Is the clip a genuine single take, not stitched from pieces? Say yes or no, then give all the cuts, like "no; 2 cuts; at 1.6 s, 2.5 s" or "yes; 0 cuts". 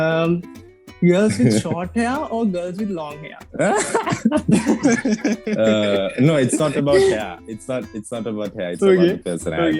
yes; 0 cuts